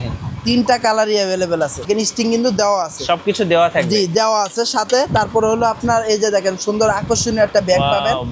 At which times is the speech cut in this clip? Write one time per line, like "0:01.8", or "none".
0:01.8